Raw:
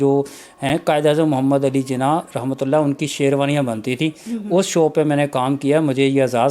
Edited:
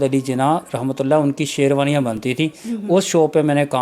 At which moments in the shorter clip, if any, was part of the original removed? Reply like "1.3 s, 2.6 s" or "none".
none